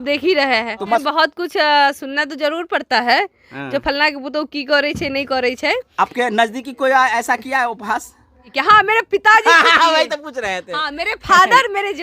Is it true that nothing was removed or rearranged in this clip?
no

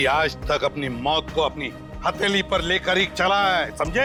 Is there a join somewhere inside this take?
no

